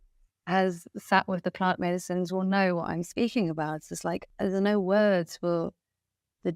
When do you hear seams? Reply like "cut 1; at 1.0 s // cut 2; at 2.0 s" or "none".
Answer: cut 1; at 4.2 s